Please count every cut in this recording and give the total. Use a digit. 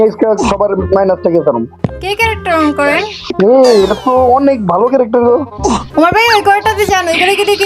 2